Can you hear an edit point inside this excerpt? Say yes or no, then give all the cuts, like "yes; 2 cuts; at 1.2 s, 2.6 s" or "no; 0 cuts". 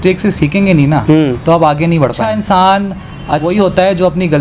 yes; 2 cuts; at 2.2 s, 3.4 s